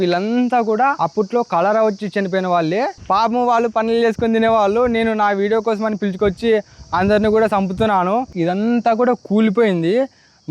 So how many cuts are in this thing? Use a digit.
3